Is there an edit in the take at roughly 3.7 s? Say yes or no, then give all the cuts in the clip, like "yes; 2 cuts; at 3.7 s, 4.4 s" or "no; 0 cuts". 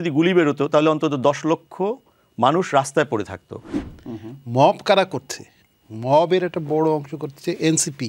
yes; 1 cut; at 3.7 s